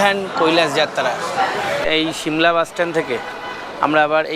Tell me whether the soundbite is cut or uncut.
cut